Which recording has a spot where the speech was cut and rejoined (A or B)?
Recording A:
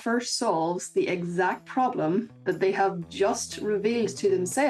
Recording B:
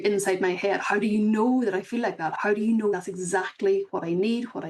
B